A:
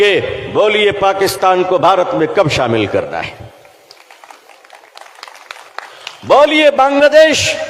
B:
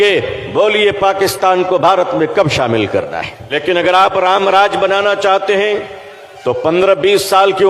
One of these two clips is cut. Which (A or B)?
B